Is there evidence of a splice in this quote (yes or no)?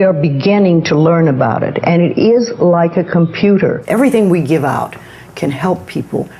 yes